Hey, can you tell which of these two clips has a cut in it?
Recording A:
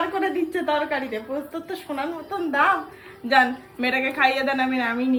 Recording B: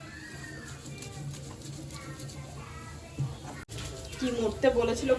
B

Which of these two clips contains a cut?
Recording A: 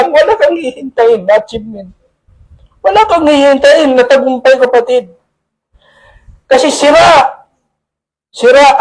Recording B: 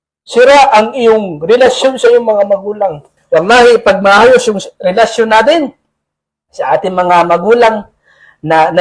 B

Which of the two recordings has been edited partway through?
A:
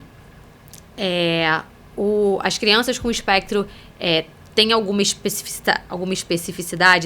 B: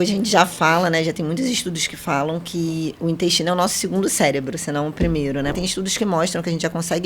B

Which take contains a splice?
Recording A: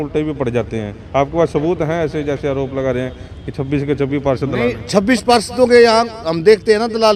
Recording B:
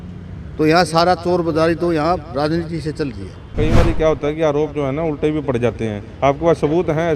B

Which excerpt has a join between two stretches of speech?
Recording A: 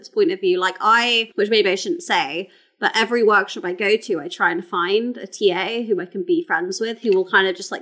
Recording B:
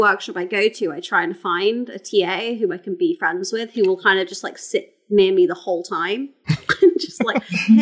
A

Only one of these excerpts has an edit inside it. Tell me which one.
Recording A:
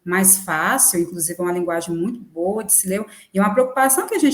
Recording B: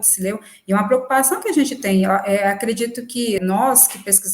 B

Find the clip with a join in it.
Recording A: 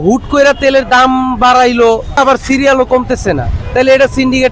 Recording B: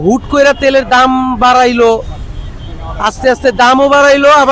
A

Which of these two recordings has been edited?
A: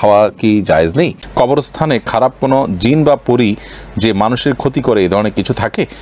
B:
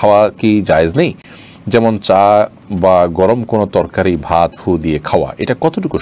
A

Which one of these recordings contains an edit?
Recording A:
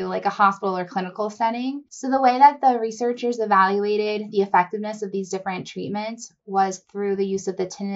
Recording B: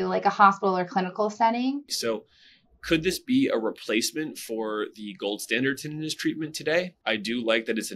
B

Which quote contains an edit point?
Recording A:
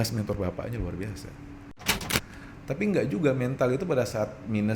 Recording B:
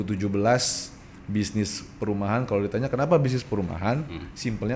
A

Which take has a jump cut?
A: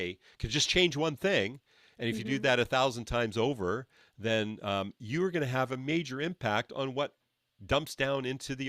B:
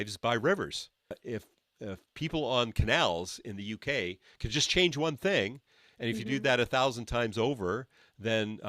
B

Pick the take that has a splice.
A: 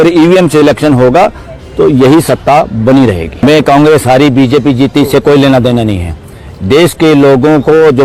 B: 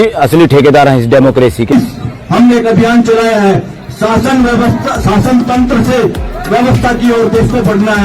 B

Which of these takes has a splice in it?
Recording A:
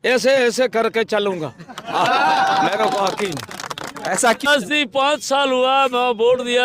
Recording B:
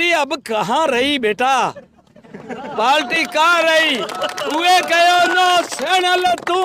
A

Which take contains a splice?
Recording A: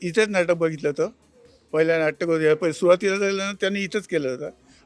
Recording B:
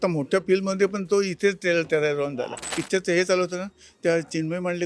B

